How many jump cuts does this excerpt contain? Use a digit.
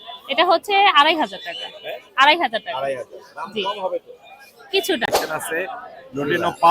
1